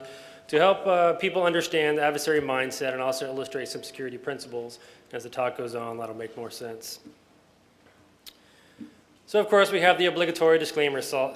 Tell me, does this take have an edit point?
no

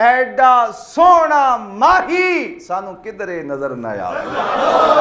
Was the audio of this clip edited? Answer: no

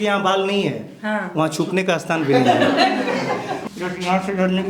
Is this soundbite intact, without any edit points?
no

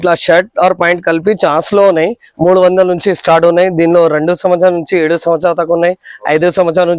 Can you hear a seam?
no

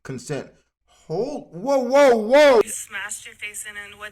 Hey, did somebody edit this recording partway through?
yes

